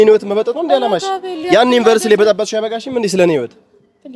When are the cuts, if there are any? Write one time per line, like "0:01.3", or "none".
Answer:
none